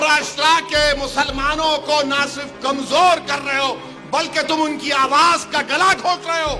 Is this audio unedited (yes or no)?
yes